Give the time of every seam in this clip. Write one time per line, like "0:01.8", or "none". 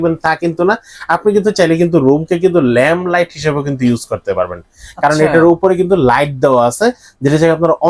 none

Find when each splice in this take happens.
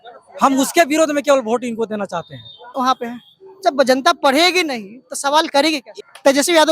0:02.7
0:05.9

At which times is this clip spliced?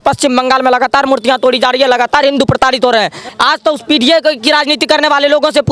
0:03.3

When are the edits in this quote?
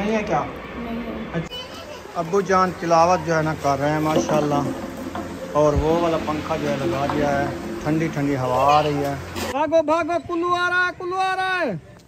0:01.5
0:09.3

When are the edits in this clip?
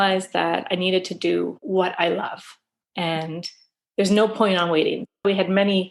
0:01.6
0:05.1

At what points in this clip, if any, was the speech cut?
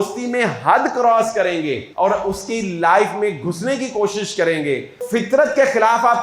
0:01.8
0:05.0

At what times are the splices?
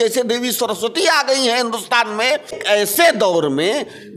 0:02.5

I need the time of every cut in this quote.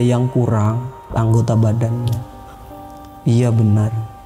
0:01.0

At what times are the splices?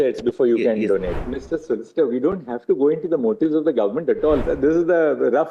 0:01.1
0:04.4

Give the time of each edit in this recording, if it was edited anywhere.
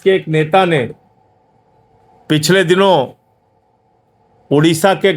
none

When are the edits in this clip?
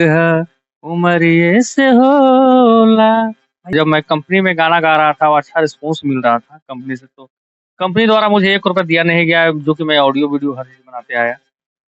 0:03.7

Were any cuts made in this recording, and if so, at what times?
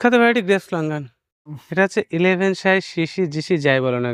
0:01.5

